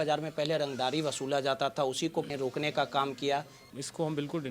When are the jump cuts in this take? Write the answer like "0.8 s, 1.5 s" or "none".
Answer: 3.6 s